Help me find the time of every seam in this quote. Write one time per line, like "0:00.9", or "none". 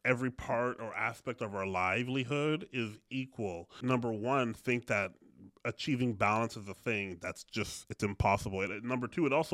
0:03.7